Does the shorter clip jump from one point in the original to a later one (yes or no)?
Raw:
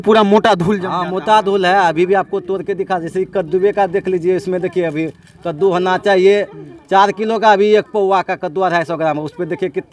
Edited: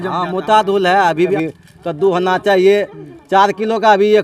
yes